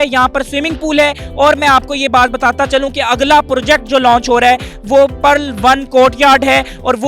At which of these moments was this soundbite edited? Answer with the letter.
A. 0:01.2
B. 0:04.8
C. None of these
C